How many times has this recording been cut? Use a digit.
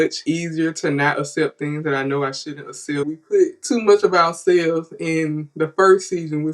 1